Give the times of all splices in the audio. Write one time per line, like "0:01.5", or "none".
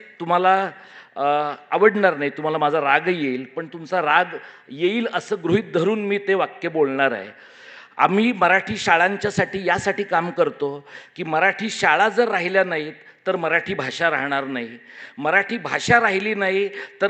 none